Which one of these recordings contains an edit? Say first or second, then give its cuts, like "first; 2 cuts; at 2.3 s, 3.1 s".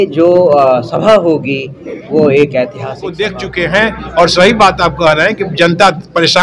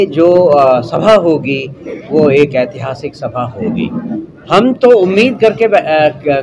first; 1 cut; at 3.1 s